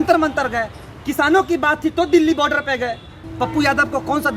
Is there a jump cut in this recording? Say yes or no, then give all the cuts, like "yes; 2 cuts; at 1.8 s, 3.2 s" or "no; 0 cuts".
yes; 1 cut; at 3.2 s